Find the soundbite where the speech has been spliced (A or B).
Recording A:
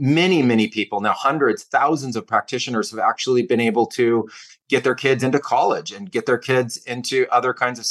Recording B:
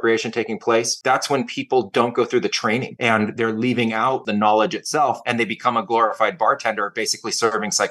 B